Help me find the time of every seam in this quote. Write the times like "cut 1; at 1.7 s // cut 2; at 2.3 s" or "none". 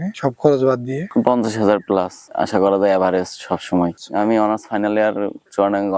cut 1; at 3.9 s